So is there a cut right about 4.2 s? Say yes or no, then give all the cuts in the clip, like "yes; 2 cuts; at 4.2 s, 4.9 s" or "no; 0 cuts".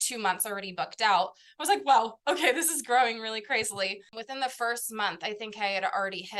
yes; 1 cut; at 4.2 s